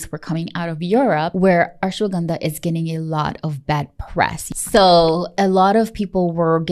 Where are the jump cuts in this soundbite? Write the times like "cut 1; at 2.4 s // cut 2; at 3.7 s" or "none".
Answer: cut 1; at 1.3 s // cut 2; at 4.4 s // cut 3; at 5.3 s